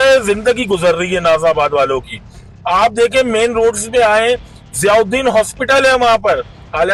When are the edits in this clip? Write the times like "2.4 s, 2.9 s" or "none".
none